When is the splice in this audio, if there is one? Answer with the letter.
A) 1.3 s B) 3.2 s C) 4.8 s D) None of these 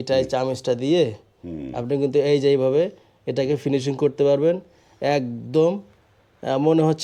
D